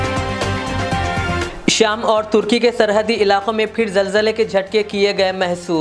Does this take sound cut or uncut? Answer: cut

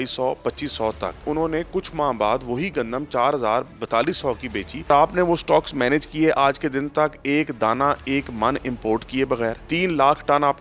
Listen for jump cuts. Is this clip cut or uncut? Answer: cut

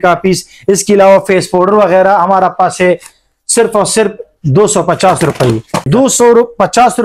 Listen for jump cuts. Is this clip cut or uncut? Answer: cut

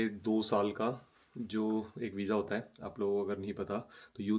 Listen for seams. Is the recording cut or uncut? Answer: uncut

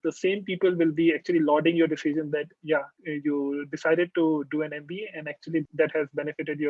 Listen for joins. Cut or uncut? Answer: cut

